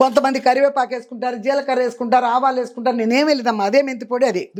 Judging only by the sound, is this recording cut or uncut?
uncut